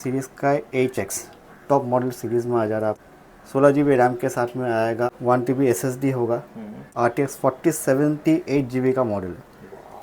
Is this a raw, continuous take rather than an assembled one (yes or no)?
no